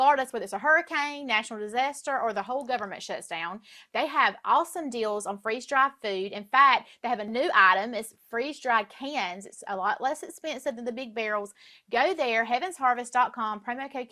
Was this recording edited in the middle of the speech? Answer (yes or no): no